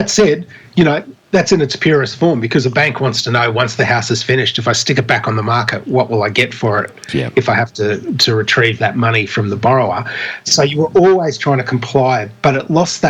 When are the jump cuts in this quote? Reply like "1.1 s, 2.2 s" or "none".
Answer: 10.4 s